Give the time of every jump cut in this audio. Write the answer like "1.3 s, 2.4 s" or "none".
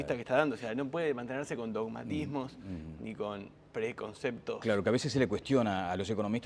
none